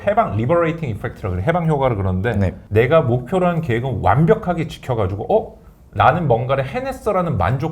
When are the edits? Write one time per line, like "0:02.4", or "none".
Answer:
0:02.6